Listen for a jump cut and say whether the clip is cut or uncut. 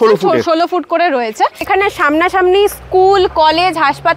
cut